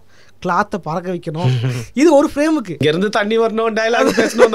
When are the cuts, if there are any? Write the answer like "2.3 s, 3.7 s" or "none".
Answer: 1.8 s, 2.7 s